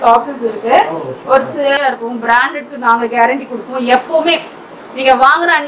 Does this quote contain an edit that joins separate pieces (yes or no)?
yes